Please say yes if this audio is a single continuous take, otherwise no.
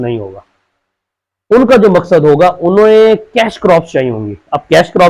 yes